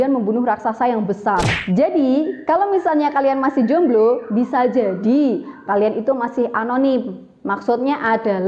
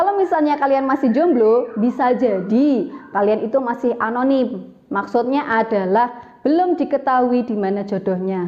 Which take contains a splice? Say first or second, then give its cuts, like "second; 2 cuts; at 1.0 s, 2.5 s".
first; 1 cut; at 1.5 s